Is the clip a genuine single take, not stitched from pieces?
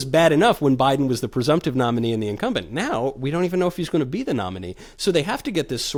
yes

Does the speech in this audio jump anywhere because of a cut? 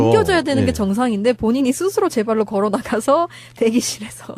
yes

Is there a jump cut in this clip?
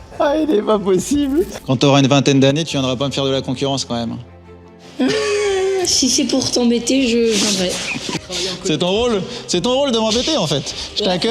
yes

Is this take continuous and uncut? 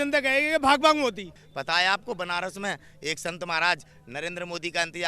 no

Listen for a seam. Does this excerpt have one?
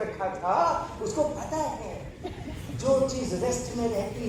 no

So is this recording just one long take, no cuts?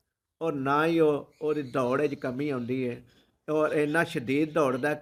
yes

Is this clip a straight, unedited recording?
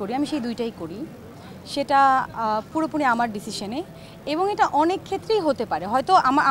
yes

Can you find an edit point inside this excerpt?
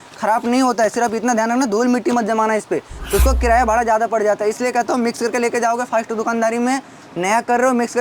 yes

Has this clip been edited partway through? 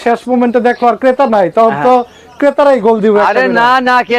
no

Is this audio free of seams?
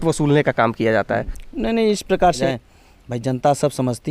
no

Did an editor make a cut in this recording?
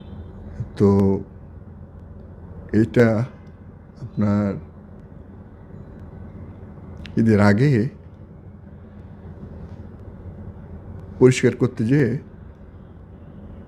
no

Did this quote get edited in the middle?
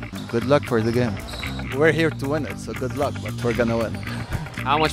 yes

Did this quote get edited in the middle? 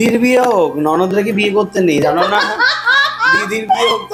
no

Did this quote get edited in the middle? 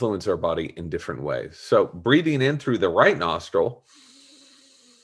no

